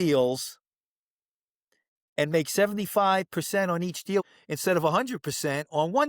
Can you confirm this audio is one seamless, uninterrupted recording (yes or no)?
no